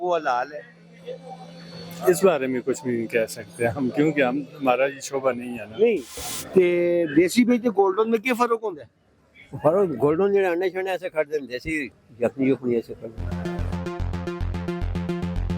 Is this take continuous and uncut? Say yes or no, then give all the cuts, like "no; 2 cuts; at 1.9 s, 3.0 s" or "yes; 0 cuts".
no; 2 cuts; at 6.2 s, 13.3 s